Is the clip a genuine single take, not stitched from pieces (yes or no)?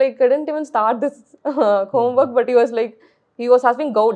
yes